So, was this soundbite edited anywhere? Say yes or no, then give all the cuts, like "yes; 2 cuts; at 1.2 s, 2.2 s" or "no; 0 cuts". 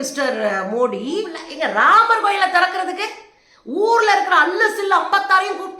yes; 1 cut; at 1.4 s